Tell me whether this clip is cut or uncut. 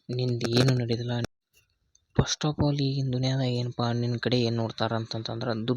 cut